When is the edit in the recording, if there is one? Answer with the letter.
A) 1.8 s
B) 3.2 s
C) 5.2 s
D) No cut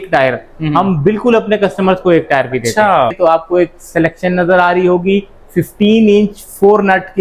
B